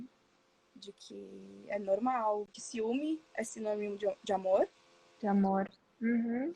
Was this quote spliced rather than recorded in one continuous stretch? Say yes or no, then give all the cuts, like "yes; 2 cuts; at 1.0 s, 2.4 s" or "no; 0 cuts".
yes; 1 cut; at 2.6 s